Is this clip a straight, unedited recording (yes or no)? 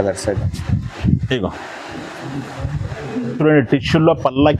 yes